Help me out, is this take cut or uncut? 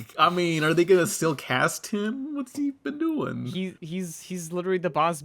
cut